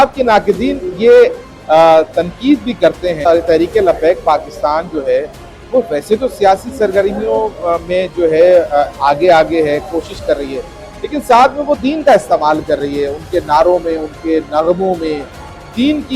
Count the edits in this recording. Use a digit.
1